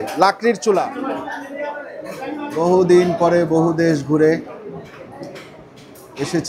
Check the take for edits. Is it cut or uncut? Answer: cut